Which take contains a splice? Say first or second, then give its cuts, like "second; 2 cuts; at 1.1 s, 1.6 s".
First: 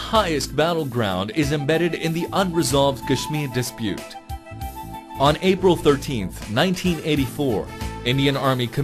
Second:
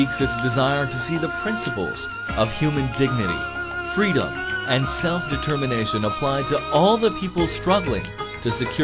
second; 1 cut; at 5.4 s